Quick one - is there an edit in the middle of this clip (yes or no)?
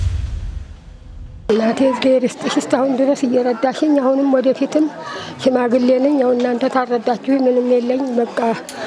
yes